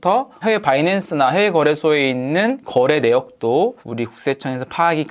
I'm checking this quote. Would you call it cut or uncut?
cut